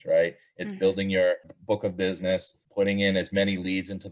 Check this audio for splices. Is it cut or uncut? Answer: cut